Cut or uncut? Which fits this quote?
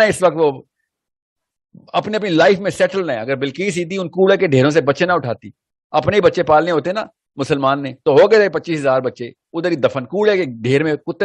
uncut